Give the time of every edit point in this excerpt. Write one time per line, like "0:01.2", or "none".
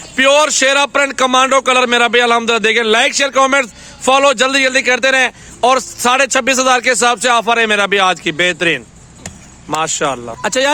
none

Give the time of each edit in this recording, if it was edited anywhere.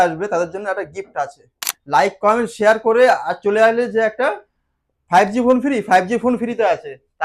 0:01.7

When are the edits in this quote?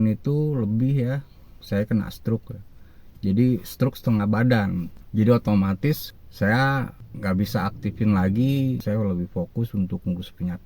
0:08.8

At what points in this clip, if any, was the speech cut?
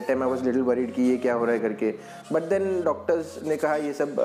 none

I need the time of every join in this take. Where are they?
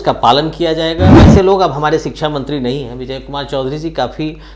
0:01.2

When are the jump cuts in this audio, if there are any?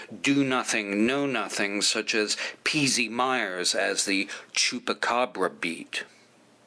none

